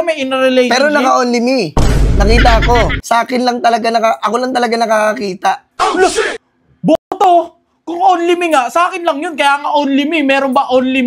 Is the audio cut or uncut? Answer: cut